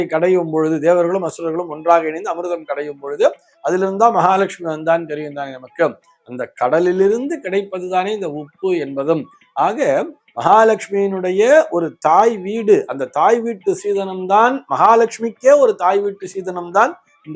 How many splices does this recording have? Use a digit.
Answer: 0